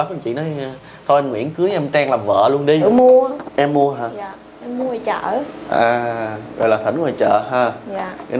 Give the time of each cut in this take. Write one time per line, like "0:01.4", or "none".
0:02.8